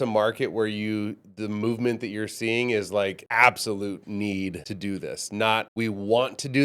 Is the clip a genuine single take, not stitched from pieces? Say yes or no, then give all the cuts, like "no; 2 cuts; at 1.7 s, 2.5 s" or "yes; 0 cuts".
no; 3 cuts; at 3.2 s, 4.7 s, 5.7 s